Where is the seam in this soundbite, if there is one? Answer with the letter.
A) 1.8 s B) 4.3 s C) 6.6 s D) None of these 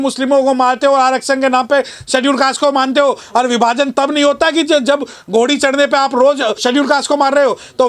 C